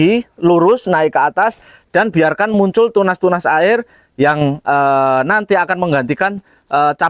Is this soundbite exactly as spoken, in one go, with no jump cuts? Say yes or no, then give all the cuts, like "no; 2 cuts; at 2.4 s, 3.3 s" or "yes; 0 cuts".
yes; 0 cuts